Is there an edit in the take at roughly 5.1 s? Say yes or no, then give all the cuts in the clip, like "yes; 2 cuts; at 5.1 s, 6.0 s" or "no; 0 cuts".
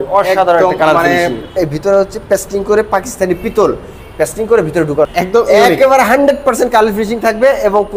yes; 2 cuts; at 1.5 s, 5.1 s